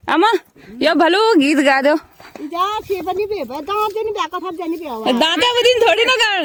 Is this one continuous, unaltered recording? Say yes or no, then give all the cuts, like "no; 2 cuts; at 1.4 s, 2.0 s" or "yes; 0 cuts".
yes; 0 cuts